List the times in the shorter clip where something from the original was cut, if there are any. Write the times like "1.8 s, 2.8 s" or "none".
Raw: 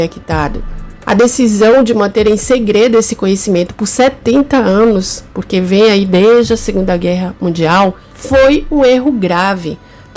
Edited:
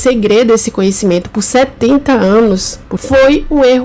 2.9 s